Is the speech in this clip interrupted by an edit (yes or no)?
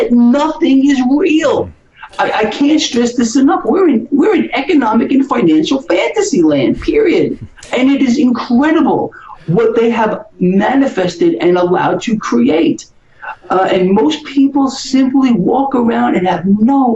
no